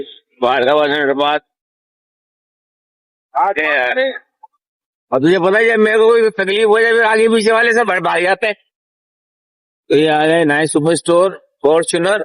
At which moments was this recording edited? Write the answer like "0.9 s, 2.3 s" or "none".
none